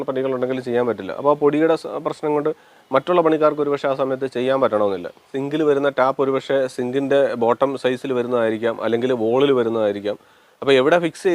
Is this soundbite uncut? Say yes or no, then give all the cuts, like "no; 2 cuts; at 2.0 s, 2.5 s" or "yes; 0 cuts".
no; 1 cut; at 5.4 s